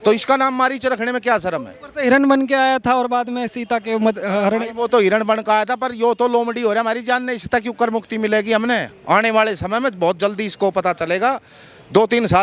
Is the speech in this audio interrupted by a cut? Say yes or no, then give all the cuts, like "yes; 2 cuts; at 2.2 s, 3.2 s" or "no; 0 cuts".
no; 0 cuts